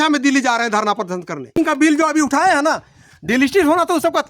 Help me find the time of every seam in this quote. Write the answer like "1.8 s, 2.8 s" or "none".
1.5 s